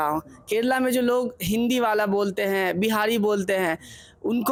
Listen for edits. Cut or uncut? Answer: uncut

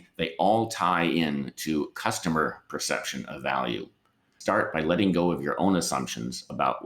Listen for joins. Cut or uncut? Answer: cut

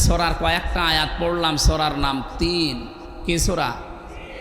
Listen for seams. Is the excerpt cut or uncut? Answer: uncut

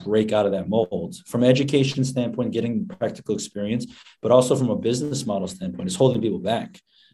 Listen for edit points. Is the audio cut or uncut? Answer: uncut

